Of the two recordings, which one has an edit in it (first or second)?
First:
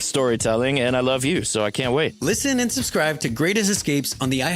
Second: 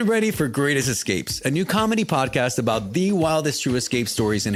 first